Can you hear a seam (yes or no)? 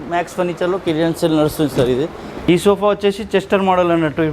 yes